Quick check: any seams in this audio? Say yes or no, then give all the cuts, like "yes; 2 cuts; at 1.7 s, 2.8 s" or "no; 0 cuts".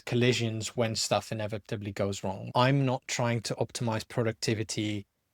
yes; 1 cut; at 2.4 s